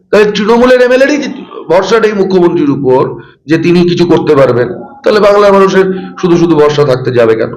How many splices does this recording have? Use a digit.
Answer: 0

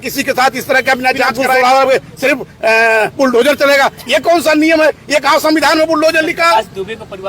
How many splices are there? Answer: 1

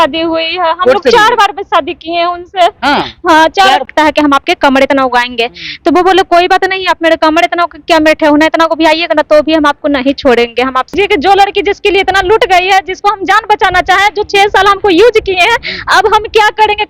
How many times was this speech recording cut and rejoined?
2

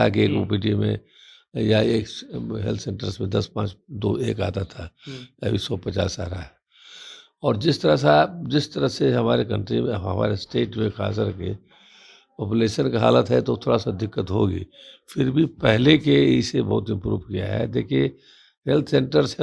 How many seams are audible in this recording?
0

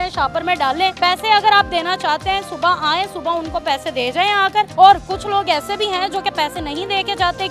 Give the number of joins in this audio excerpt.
2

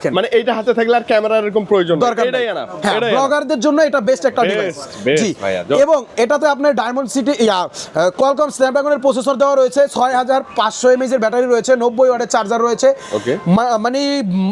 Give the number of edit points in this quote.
0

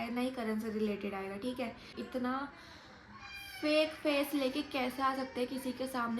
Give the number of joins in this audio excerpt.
1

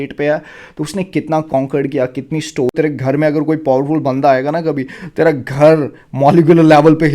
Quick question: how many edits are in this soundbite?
1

